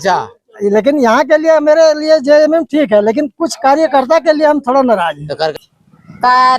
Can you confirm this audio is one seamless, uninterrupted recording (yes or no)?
no